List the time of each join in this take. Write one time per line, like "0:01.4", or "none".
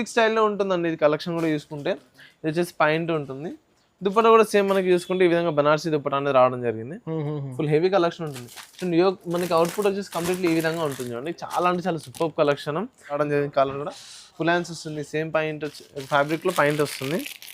0:13.2